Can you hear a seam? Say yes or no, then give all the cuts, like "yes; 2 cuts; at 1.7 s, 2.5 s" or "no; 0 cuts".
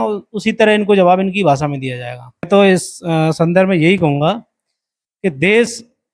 yes; 1 cut; at 2.5 s